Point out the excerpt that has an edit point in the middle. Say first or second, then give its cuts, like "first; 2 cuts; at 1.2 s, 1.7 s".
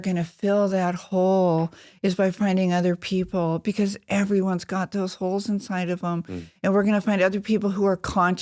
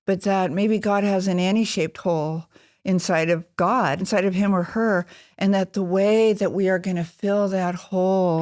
second; 1 cut; at 4.0 s